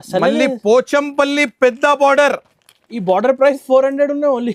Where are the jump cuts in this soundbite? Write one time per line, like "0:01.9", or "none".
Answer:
none